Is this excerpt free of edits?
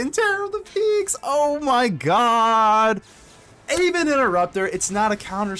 yes; 0 cuts

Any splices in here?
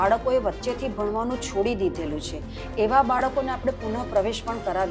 no; 0 cuts

